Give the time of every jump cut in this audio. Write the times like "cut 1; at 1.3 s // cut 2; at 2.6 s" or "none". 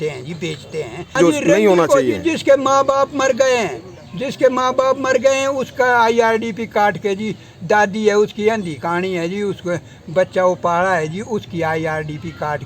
cut 1; at 1.2 s